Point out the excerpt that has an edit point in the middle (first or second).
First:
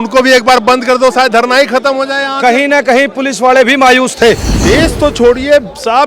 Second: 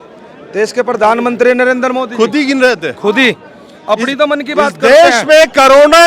first